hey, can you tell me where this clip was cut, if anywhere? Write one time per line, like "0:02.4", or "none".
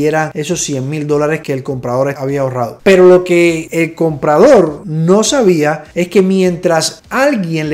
none